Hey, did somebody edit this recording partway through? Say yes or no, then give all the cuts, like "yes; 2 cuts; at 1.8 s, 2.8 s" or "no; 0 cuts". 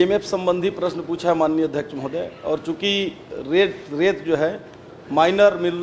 no; 0 cuts